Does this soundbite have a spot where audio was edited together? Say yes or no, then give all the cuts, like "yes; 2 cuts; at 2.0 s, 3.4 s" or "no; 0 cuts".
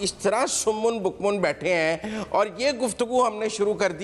no; 0 cuts